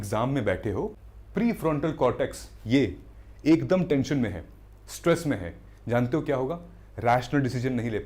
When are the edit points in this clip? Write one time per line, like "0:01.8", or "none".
0:01.0